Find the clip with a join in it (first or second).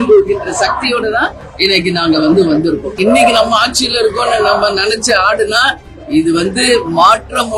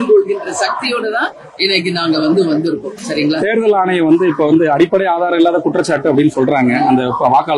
first